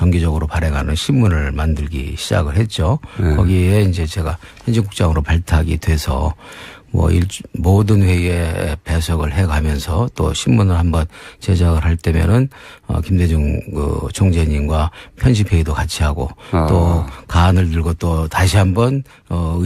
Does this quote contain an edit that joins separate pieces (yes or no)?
yes